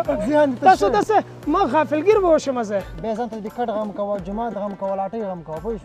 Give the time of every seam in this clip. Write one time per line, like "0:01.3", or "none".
0:02.9

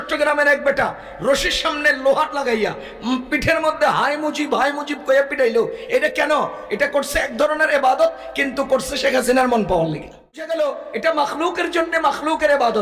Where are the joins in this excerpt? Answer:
0:10.5

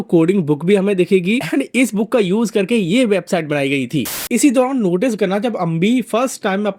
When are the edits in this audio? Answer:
0:04.1

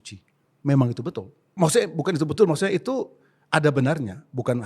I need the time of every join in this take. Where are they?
0:01.4

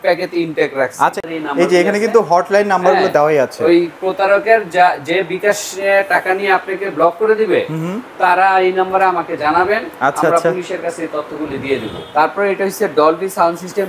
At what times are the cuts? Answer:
0:01.2
0:12.0

